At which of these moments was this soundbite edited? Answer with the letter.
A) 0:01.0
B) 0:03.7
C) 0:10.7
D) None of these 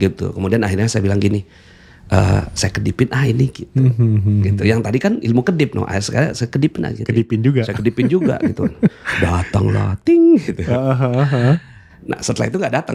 D